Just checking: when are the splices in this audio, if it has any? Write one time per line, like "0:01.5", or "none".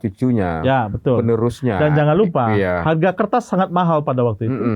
none